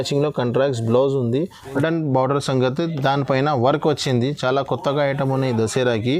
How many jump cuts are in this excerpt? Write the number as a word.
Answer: one